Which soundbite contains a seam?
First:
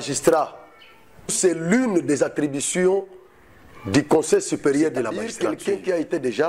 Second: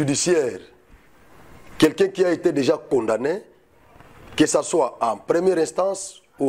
first; 2 cuts; at 1.4 s, 5.3 s

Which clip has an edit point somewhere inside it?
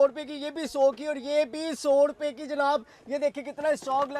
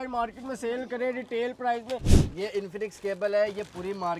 second; 1 cut; at 2.2 s

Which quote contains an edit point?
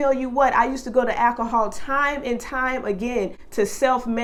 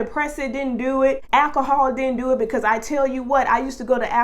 second; 1 cut; at 1.2 s

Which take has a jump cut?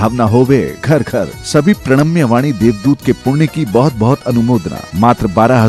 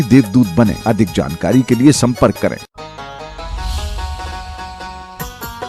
second; 1 cut; at 2.6 s

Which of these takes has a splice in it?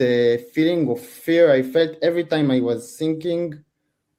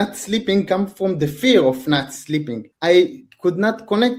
second; 1 cut; at 2.6 s

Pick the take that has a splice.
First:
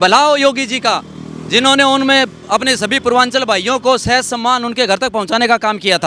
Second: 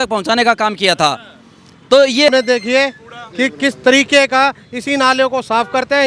second; 1 cut; at 2.3 s

